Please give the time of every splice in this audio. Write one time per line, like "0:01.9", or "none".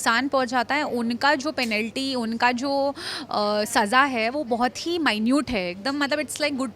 none